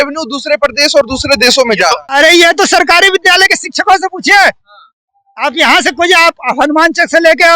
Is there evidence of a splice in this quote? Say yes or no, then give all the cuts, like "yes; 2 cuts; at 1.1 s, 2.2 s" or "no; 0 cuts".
yes; 1 cut; at 2.0 s